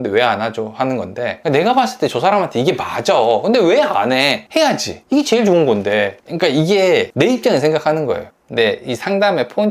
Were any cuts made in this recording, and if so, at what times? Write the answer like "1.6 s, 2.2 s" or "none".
1.4 s, 8.2 s